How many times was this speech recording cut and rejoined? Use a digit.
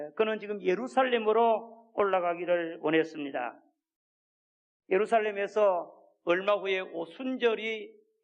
1